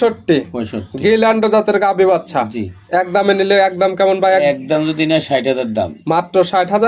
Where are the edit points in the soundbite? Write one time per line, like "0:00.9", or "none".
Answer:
none